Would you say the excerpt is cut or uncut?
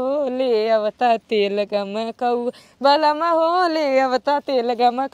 uncut